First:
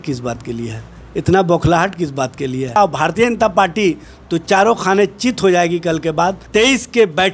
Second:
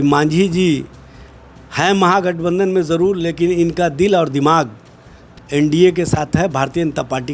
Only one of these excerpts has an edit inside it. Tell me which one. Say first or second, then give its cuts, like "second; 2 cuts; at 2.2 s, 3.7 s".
first; 2 cuts; at 2.8 s, 6.4 s